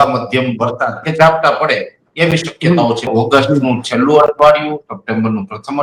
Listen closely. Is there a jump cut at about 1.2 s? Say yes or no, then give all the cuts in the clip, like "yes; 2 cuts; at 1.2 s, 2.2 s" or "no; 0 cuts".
no; 1 cut; at 3.1 s